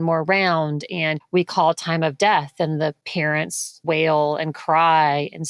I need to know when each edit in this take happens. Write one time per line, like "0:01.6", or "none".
0:01.2
0:03.4